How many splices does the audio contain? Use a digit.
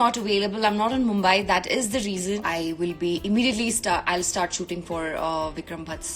1